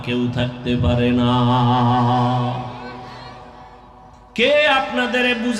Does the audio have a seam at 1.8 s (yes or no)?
no